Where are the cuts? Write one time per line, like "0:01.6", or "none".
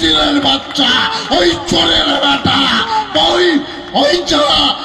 none

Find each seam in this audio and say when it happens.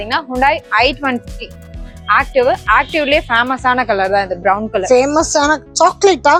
none

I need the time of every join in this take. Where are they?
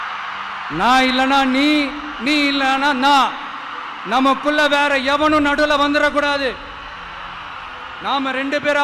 none

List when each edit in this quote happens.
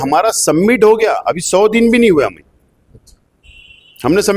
none

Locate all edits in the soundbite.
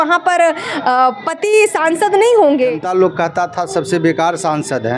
0:02.8

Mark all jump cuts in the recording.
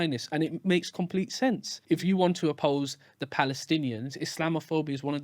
0:01.7
0:02.6

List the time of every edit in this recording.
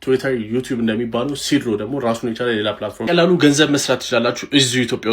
0:03.1

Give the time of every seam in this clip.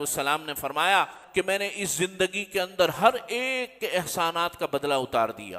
0:01.2

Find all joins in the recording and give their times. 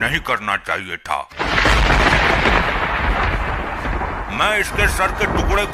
0:01.3

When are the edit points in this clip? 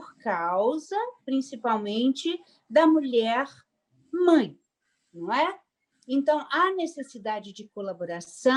none

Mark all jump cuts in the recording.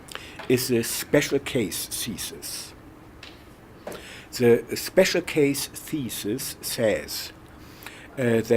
0:05.6

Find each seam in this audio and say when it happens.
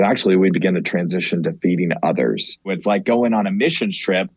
0:02.8

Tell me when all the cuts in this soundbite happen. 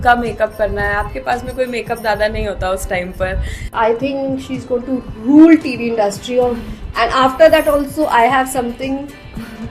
0:03.7

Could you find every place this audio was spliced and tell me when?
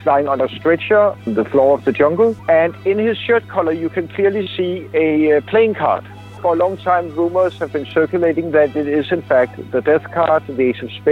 0:01.2
0:02.4
0:06.3

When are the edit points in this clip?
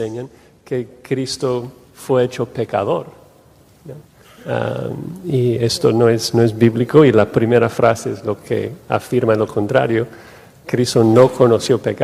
none

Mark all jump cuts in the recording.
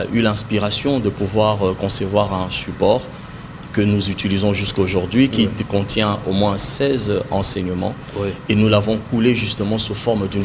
none

